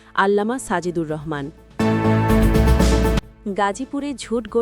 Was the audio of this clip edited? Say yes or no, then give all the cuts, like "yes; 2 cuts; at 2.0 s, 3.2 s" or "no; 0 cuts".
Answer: yes; 2 cuts; at 1.6 s, 3.2 s